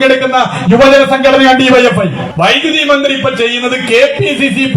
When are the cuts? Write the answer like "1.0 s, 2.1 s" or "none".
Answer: 2.2 s